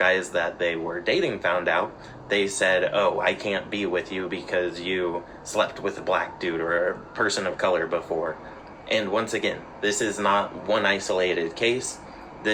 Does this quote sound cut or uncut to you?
uncut